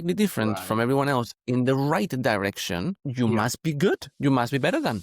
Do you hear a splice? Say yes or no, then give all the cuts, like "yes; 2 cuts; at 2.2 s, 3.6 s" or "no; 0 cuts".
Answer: yes; 2 cuts; at 3.0 s, 4.1 s